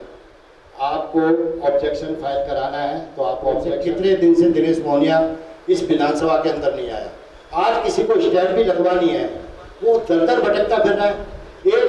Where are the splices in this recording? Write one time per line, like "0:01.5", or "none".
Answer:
0:03.5